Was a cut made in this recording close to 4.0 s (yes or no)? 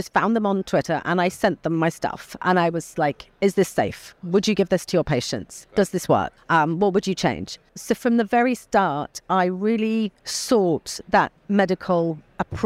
no